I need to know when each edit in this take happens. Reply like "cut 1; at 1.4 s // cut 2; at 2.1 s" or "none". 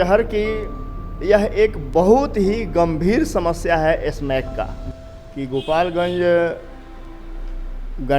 cut 1; at 4.8 s